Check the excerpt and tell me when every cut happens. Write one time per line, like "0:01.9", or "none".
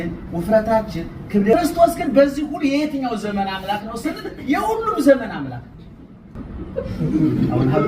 0:01.5
0:06.4